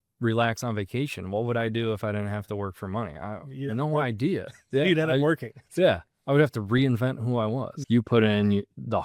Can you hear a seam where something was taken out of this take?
yes; 1 cut; at 7.7 s

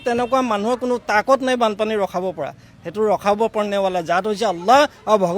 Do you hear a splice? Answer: no; 0 cuts

